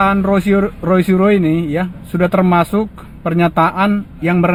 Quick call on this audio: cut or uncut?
uncut